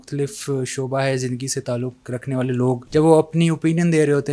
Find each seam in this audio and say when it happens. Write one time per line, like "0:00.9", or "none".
0:02.8